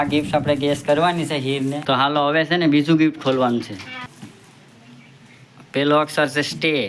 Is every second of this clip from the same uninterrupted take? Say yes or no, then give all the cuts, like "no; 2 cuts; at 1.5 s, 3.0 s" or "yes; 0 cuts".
no; 2 cuts; at 1.8 s, 4.1 s